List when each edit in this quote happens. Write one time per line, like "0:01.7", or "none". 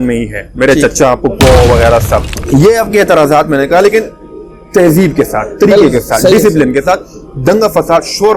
0:02.3